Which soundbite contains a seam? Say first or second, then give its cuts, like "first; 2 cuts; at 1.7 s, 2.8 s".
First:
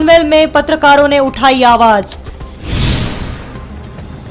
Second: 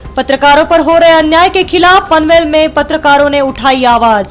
first; 1 cut; at 3.4 s